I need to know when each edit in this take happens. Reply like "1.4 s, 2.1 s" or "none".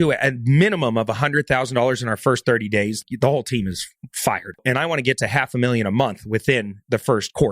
3.0 s, 4.6 s